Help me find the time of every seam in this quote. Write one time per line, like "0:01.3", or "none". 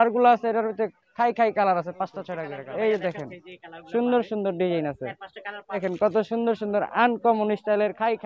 0:02.4
0:05.8